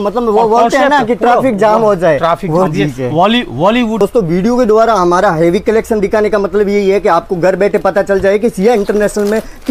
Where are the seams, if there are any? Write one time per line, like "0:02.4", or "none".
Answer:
0:04.0